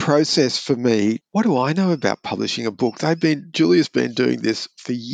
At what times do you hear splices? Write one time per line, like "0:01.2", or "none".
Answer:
0:01.2

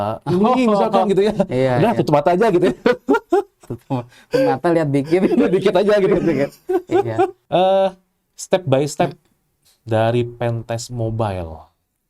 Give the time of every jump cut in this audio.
0:07.4

